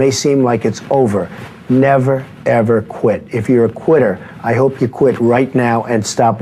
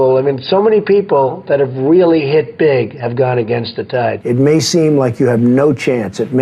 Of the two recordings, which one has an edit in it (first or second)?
second